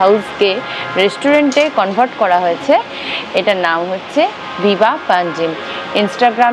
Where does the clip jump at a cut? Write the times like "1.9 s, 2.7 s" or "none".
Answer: none